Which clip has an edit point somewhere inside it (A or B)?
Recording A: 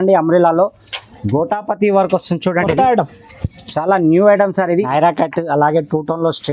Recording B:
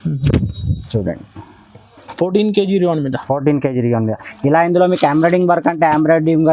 A